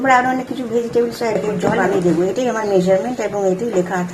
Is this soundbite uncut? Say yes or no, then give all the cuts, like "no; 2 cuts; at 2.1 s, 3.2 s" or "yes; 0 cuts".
no; 1 cut; at 1.9 s